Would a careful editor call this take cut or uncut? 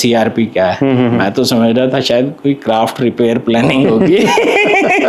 uncut